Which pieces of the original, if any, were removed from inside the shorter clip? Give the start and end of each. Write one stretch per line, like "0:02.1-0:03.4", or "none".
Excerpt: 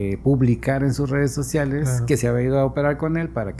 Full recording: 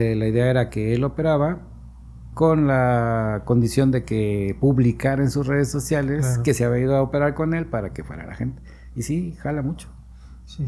none